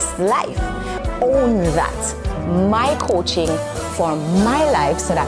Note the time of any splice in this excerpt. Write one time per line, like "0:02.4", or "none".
0:01.0